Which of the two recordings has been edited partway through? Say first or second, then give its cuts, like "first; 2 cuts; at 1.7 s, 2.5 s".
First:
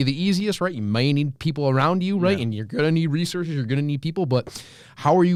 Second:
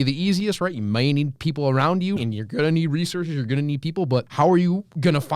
second; 2 cuts; at 2.2 s, 4.3 s